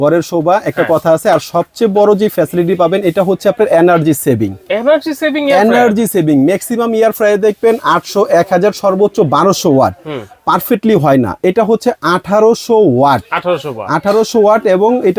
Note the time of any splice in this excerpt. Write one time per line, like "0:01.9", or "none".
none